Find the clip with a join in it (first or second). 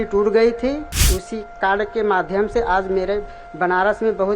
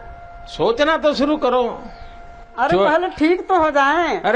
first